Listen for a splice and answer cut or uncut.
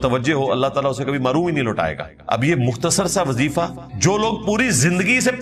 cut